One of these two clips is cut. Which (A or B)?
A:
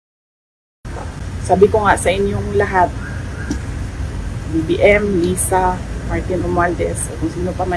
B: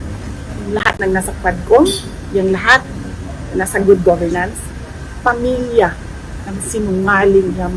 A